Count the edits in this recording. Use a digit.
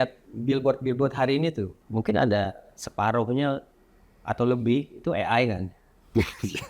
1